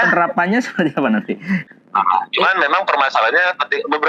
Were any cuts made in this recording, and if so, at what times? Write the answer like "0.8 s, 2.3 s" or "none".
1.7 s